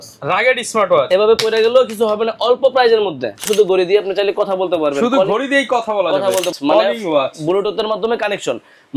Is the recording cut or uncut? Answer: cut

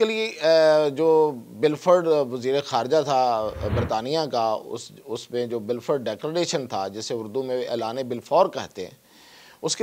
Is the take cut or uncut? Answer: uncut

